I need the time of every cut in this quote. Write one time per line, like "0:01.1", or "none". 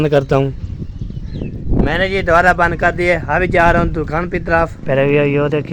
0:01.6
0:04.8